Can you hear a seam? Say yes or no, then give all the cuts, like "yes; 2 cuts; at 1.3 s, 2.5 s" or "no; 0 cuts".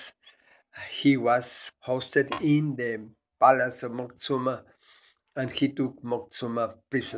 yes; 1 cut; at 1.6 s